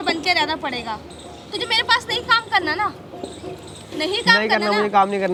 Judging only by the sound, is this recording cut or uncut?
uncut